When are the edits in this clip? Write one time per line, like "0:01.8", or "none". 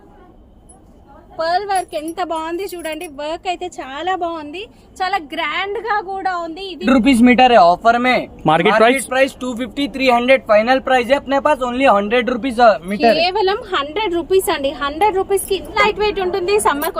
0:06.8
0:15.8